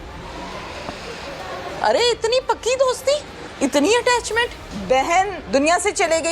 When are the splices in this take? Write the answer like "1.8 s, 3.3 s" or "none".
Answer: 1.7 s, 3.4 s, 4.7 s, 5.4 s